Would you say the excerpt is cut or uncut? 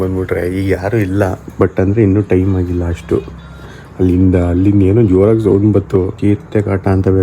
cut